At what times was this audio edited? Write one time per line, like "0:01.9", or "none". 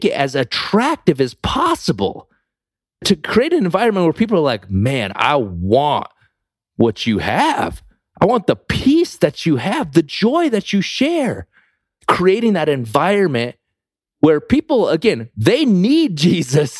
none